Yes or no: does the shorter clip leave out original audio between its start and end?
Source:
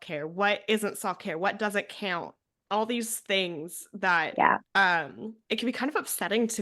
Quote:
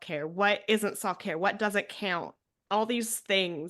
no